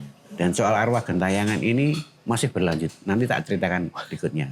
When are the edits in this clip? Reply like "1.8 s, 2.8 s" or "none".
2.1 s